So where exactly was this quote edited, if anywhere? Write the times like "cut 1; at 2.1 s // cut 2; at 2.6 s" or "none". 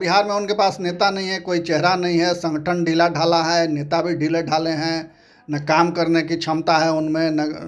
none